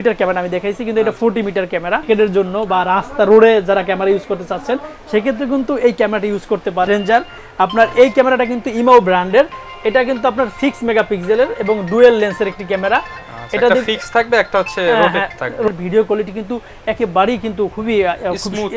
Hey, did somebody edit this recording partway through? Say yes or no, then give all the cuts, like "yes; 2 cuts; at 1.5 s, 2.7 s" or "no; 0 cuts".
yes; 3 cuts; at 2.0 s, 6.9 s, 15.7 s